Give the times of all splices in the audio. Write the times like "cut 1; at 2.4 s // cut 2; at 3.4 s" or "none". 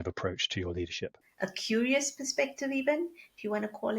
cut 1; at 1.2 s